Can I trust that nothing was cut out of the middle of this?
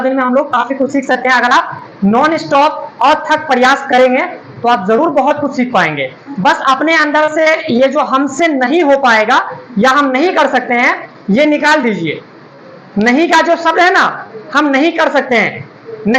yes; 0 cuts

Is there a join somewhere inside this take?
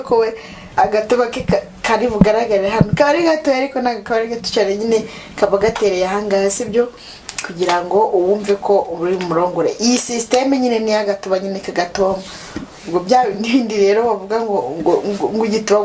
no; 0 cuts

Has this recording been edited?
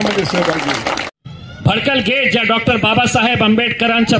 yes; 1 cut; at 1.1 s

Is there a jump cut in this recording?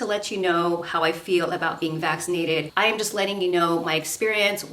yes; 1 cut; at 2.7 s

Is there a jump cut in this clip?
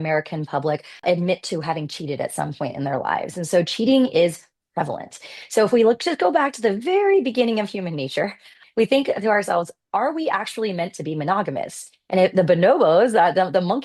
yes; 2 cuts; at 1.0 s, 8.6 s

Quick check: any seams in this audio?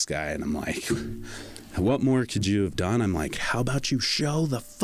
yes; 1 cut; at 3.4 s

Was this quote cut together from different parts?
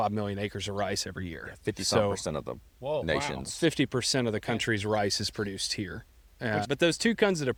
no; 0 cuts

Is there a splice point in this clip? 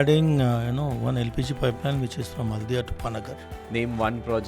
yes; 1 cut; at 3.5 s

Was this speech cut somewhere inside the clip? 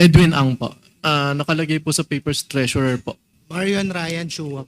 yes; 2 cuts; at 1.1 s, 3.4 s

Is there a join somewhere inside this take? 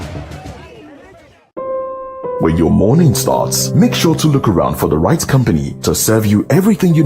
yes; 1 cut; at 1.5 s

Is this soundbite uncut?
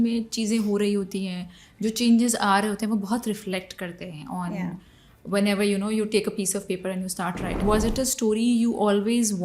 no; 1 cut; at 7.6 s

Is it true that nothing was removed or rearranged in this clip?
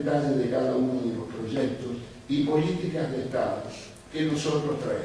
yes; 0 cuts

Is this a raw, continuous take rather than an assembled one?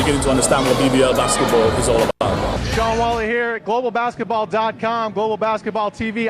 no; 2 cuts; at 0.9 s, 2.1 s

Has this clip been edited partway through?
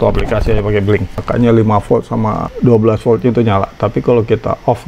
yes; 1 cut; at 1.1 s

